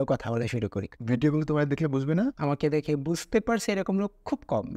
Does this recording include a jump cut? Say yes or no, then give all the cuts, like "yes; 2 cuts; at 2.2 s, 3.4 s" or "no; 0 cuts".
yes; 2 cuts; at 0.9 s, 2.4 s